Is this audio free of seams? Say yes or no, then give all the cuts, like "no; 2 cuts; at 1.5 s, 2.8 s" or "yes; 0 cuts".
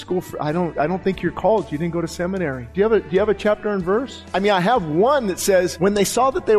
no; 4 cuts; at 0.7 s, 2.6 s, 4.2 s, 5.7 s